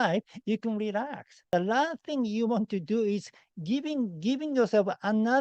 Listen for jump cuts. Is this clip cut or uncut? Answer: cut